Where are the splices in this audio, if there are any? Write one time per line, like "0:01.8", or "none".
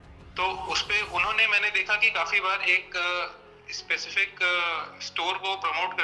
none

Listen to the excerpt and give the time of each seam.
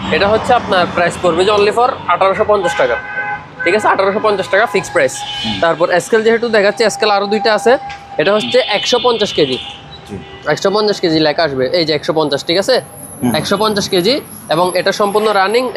none

